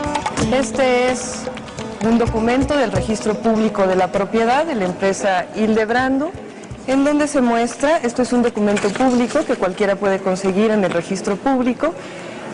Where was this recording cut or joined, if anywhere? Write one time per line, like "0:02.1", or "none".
0:03.0